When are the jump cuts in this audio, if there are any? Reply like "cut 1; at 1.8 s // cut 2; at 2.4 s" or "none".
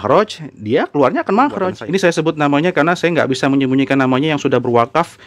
cut 1; at 1.8 s